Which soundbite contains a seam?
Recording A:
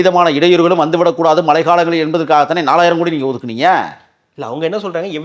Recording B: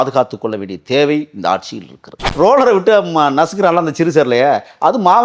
B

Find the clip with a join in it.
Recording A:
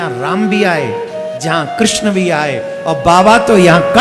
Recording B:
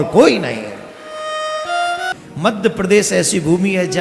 B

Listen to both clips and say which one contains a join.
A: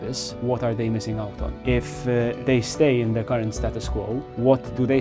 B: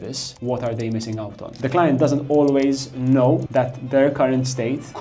B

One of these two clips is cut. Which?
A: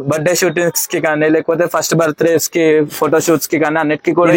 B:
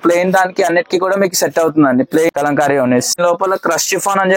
B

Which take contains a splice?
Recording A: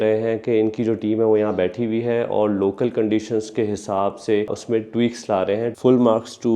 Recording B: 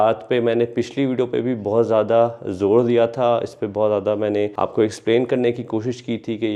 A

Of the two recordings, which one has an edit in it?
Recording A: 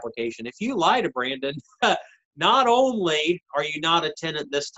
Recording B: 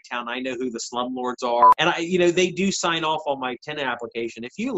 B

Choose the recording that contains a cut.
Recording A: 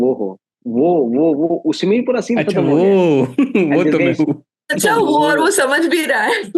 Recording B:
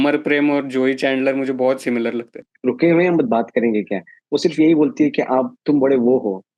B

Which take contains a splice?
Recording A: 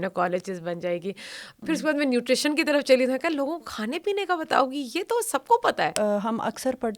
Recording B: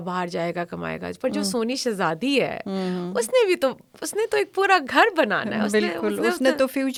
A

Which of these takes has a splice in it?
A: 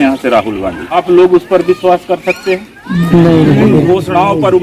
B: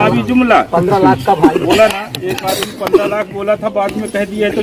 A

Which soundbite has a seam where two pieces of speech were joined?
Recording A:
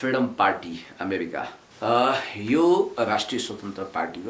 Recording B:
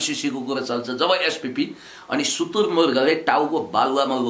A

